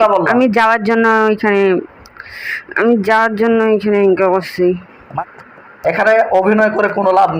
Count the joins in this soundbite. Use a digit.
1